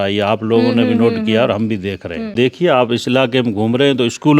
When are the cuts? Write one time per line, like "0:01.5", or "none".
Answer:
0:02.3